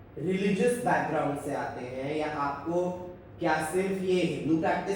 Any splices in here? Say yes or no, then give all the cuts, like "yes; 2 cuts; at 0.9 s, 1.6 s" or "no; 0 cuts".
no; 0 cuts